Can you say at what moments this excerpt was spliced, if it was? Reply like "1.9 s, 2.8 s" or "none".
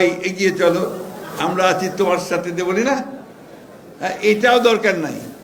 none

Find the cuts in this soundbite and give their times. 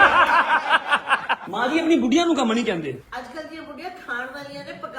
1.4 s, 3.0 s

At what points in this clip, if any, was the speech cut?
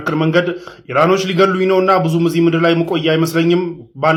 none

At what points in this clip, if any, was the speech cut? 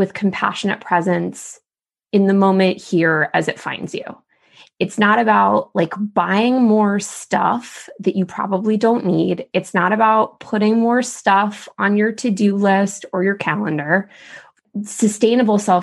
14.5 s

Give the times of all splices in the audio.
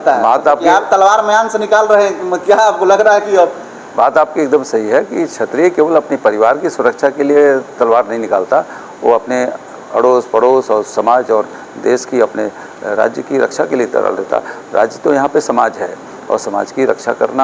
none

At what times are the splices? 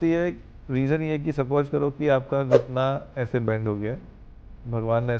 none

